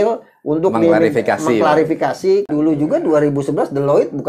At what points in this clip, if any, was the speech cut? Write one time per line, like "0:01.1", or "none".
0:02.5